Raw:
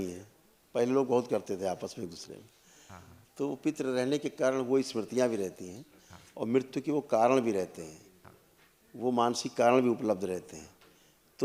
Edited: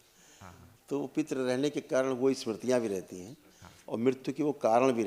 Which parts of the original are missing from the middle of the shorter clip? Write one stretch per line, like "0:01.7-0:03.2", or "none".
none